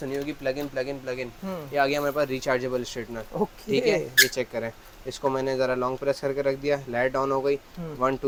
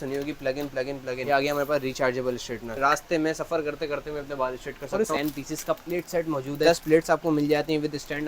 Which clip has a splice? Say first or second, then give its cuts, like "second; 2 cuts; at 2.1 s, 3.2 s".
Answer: second; 4 cuts; at 1.2 s, 2.7 s, 5.1 s, 6.6 s